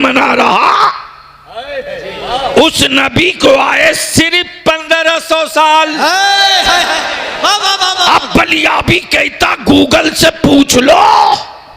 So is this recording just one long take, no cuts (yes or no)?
yes